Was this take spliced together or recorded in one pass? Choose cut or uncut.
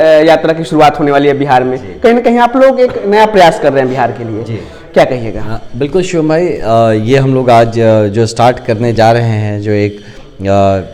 uncut